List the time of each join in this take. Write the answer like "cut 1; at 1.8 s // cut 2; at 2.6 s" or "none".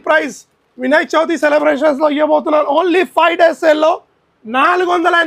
none